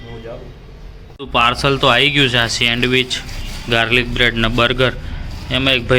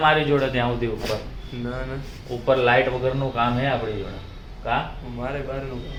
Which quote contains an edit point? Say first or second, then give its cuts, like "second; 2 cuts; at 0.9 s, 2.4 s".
first; 1 cut; at 1.2 s